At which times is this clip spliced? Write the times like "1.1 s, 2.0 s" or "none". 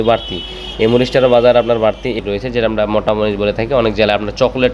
2.2 s